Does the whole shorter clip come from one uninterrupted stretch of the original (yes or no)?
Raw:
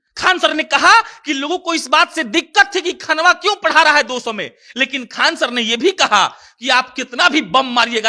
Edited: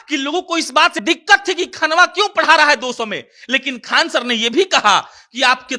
no